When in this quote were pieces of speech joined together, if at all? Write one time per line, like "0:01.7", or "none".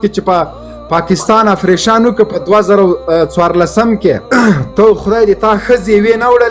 none